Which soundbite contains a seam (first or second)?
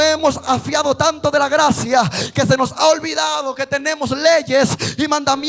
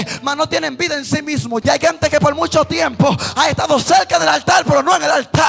second